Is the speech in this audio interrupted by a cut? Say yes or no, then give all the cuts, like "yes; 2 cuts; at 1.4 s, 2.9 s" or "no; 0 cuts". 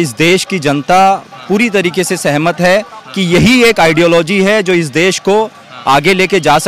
no; 0 cuts